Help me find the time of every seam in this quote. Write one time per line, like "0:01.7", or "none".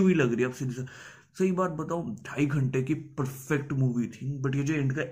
none